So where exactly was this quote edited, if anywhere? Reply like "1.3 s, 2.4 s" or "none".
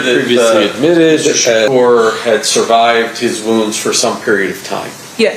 1.7 s